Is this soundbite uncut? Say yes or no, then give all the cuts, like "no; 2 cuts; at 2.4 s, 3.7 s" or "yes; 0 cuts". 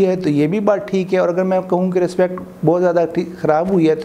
yes; 0 cuts